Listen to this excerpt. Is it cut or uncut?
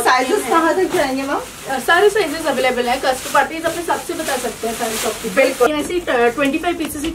cut